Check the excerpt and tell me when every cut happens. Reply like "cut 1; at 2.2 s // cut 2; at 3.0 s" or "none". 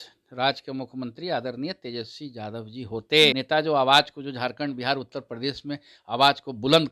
cut 1; at 3.3 s